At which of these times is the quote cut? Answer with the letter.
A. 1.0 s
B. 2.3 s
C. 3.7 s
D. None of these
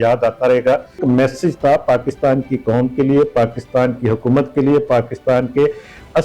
A